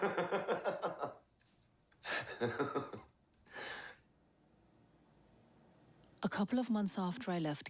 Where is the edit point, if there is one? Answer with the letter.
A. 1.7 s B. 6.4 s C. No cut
B